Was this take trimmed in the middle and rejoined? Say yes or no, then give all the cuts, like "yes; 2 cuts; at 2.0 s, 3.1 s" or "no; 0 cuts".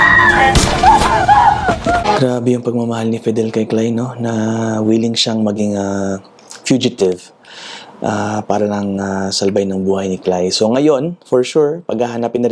yes; 1 cut; at 2.0 s